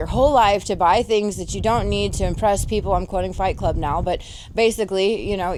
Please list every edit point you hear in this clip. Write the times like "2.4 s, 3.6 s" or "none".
none